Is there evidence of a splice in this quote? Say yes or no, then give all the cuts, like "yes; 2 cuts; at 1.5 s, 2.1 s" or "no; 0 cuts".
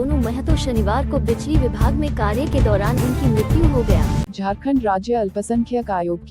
yes; 1 cut; at 4.3 s